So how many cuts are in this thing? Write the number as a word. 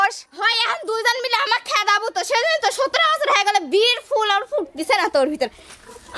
zero